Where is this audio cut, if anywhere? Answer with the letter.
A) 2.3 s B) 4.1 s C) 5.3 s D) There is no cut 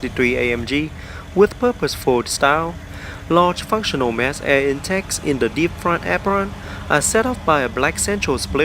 A